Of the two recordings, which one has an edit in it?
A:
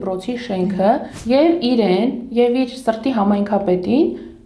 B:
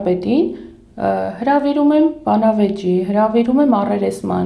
A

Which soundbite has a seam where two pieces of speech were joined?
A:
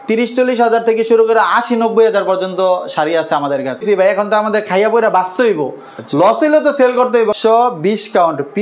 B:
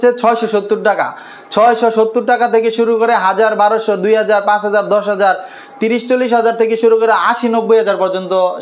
A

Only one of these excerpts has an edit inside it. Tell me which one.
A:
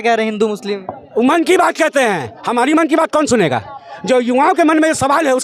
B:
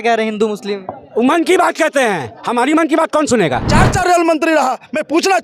B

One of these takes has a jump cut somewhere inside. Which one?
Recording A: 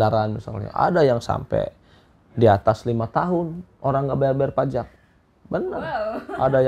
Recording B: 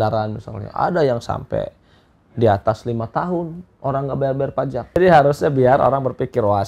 B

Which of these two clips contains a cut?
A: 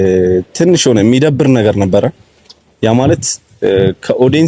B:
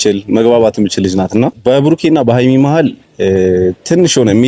B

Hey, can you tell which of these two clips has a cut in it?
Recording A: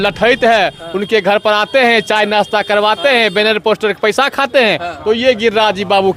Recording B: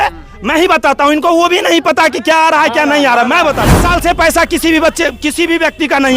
B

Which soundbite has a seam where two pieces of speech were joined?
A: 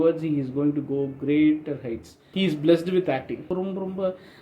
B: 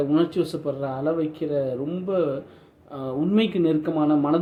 A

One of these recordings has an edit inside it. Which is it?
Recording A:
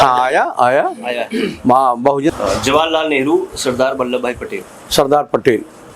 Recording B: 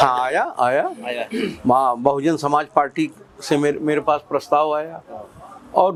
A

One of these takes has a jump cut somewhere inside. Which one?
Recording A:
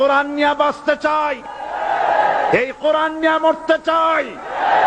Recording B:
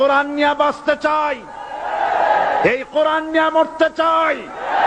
A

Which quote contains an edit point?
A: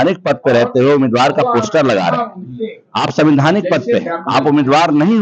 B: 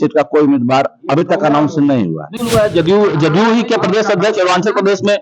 B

